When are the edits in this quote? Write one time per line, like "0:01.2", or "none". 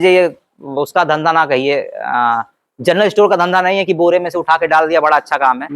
none